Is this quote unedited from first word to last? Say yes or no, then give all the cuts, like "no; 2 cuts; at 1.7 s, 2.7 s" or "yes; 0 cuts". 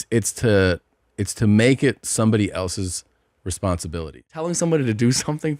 no; 1 cut; at 4.5 s